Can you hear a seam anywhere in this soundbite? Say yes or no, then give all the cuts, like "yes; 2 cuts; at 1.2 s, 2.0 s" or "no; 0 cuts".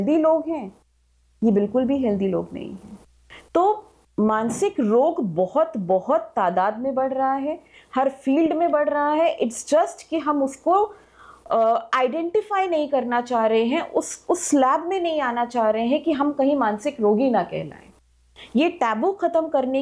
no; 0 cuts